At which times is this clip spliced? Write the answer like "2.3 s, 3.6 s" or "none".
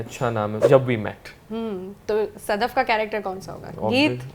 none

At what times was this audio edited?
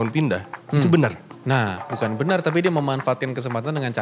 1.3 s

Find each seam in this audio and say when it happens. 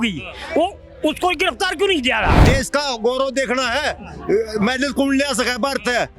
2.4 s

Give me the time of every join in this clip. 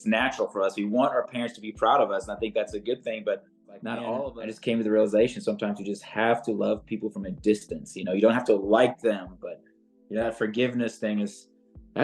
4.3 s

